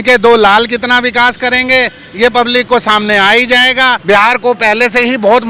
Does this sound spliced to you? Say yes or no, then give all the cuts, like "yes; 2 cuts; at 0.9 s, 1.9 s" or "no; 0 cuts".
yes; 1 cut; at 4.0 s